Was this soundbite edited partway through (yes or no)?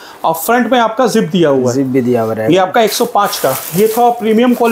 no